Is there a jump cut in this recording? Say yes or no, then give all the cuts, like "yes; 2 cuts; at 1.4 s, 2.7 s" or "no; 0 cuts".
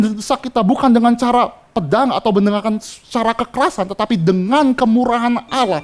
no; 0 cuts